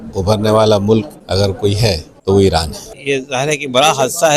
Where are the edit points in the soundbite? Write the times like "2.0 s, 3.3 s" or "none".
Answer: 1.7 s, 3.0 s